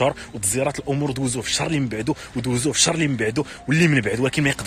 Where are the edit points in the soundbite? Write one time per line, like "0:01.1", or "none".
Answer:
none